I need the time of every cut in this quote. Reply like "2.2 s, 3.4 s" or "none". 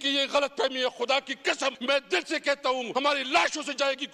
1.8 s, 2.9 s